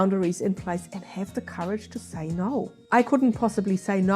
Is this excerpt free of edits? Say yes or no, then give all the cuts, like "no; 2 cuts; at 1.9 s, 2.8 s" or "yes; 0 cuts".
no; 1 cut; at 2.8 s